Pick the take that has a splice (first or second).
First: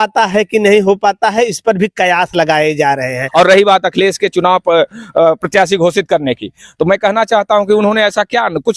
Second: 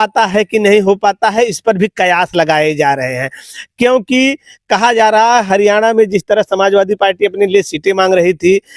first